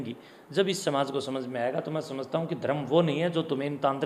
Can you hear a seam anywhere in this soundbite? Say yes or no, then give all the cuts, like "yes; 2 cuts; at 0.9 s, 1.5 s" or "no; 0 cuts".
no; 0 cuts